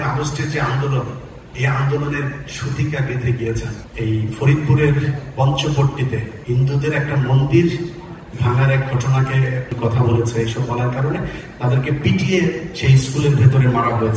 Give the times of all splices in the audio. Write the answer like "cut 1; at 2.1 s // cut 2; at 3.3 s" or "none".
cut 1; at 3.8 s // cut 2; at 6.3 s // cut 3; at 9.7 s